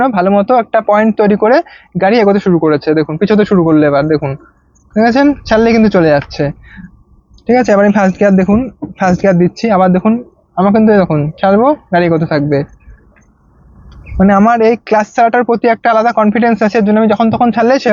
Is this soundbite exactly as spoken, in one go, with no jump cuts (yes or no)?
yes